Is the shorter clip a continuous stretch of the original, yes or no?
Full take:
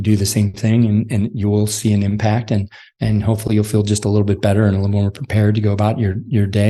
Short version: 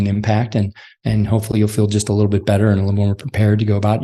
yes